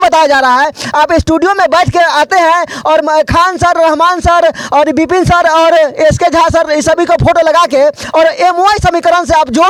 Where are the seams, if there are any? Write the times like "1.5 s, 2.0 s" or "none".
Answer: none